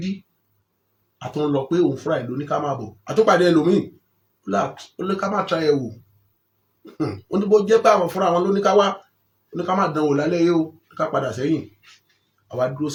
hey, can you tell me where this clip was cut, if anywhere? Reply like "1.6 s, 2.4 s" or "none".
none